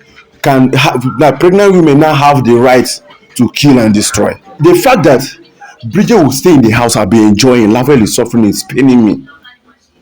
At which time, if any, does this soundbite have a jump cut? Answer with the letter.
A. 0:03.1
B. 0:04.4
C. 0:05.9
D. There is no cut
B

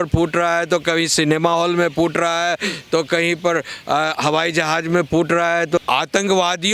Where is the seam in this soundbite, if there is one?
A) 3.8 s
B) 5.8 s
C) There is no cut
B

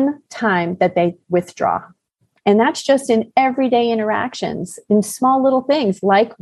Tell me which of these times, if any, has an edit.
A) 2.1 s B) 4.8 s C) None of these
A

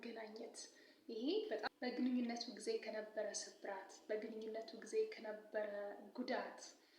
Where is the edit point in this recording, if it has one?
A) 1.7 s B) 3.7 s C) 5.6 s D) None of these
A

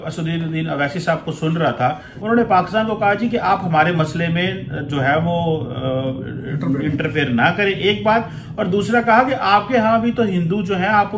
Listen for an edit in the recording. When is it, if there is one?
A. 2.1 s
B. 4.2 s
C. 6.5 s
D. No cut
A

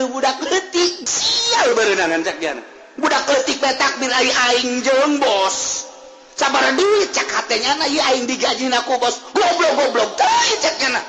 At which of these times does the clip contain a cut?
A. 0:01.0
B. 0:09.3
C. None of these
A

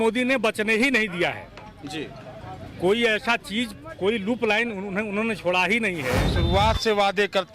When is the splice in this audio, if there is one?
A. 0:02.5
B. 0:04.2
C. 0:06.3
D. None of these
C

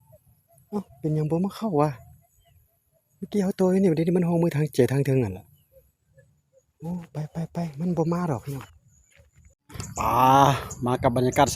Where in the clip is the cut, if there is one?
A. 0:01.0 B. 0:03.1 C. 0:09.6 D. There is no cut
C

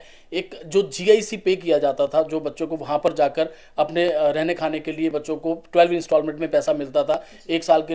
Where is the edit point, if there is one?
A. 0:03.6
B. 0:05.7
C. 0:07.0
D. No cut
D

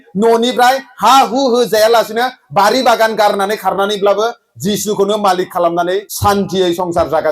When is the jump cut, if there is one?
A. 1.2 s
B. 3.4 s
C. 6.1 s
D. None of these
C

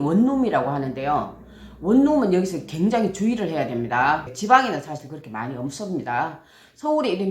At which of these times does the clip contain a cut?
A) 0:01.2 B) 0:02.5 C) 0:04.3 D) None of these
C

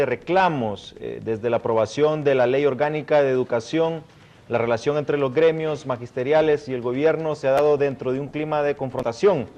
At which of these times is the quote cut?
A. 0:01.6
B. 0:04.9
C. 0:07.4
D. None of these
C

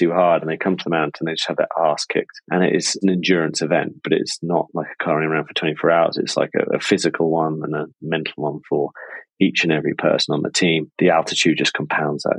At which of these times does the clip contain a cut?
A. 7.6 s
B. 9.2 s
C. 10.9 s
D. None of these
C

